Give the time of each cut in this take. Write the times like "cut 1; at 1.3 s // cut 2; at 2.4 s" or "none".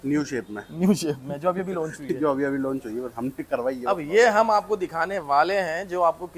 none